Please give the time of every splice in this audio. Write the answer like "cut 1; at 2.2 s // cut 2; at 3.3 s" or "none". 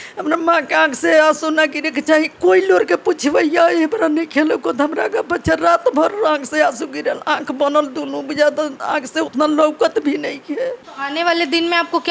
cut 1; at 10.9 s